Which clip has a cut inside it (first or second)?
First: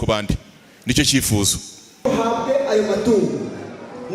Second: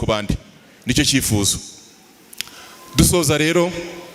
first